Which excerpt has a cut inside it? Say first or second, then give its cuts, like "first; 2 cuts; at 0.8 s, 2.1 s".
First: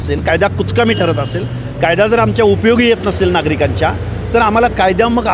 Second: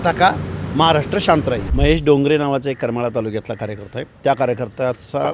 second; 1 cut; at 1.7 s